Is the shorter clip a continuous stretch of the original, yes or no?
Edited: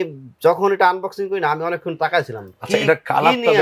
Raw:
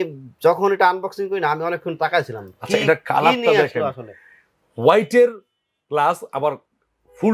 yes